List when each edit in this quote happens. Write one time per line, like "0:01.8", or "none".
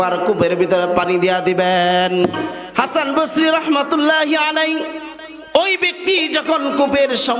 0:02.6

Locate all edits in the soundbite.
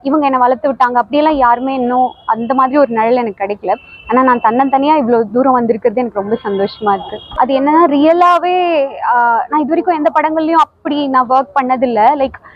0:07.2

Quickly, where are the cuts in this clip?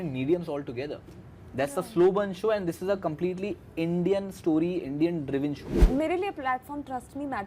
0:05.7

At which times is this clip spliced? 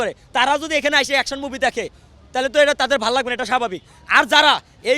none

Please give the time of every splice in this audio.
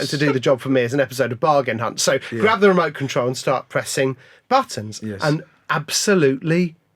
none

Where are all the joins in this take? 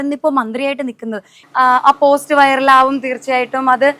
0:01.4

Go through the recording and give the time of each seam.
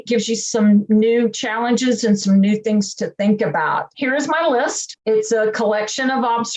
0:03.9
0:04.9

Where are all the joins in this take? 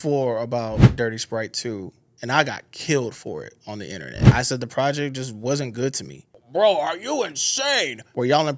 0:00.9

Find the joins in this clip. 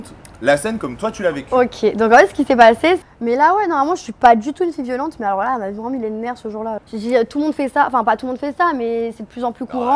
0:03.1
0:06.8

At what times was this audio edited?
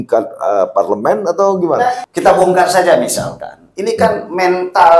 0:01.9

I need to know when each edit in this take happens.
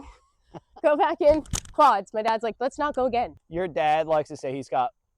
0:03.4

